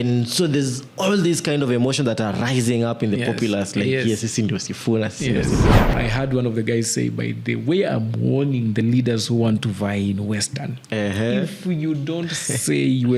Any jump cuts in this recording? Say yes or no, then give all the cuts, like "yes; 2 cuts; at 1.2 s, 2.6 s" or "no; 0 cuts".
yes; 1 cut; at 5.9 s